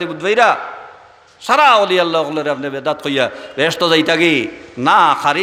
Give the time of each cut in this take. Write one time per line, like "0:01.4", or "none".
none